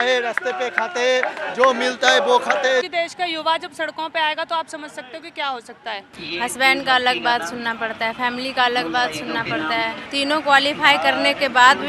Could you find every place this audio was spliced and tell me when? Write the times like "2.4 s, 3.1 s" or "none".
2.9 s, 6.1 s, 10.0 s